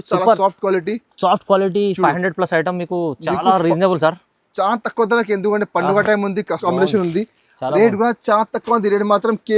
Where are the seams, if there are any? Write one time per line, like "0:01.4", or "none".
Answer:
0:06.6